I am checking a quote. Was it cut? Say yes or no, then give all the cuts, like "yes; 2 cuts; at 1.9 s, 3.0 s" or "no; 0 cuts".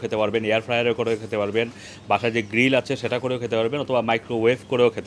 no; 0 cuts